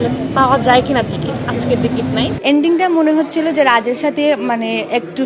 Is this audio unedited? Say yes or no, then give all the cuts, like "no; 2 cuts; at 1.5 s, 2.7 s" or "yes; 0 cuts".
no; 1 cut; at 2.3 s